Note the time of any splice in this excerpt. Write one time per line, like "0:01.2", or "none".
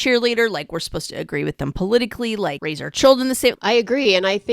0:02.6
0:03.5